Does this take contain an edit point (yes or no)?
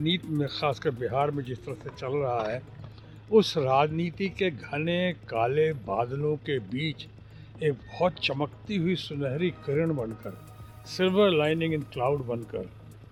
no